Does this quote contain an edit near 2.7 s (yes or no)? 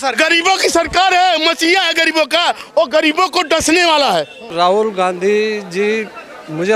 no